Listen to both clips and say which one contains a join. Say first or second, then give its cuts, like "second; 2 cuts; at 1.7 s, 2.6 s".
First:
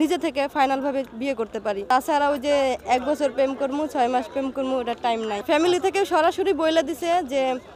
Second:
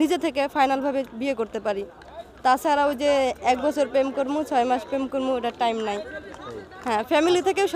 first; 2 cuts; at 1.9 s, 5.4 s